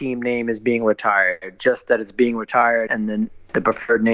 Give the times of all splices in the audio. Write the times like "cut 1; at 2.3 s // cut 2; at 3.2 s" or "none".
cut 1; at 2.9 s